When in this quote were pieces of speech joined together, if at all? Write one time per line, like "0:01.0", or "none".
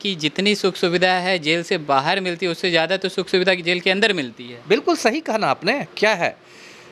none